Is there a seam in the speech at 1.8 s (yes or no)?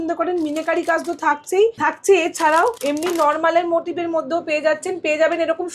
yes